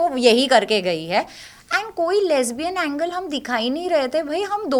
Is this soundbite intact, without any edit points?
yes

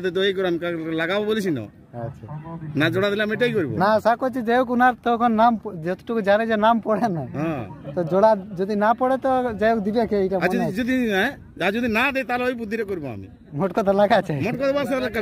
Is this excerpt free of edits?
yes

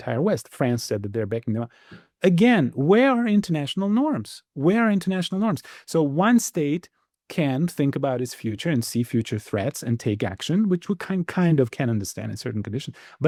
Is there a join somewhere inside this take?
no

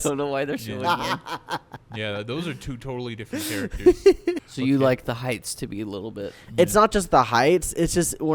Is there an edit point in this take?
yes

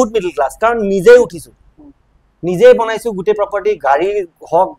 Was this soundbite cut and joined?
no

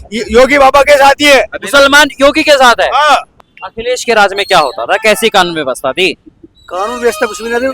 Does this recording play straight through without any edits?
no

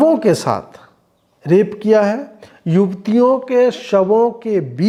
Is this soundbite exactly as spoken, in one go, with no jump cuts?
yes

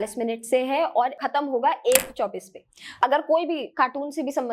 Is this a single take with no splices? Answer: no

